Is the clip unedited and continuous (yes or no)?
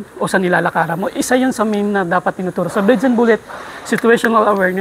yes